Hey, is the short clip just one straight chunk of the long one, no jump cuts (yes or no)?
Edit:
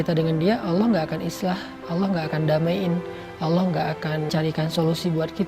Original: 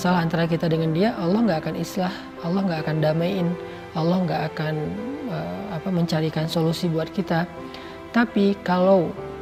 no